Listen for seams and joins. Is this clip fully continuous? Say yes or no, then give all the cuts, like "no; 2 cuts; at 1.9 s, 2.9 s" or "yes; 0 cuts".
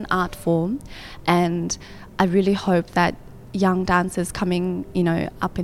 yes; 0 cuts